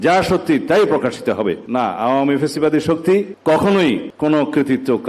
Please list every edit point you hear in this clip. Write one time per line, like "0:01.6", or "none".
0:01.6
0:03.3
0:04.1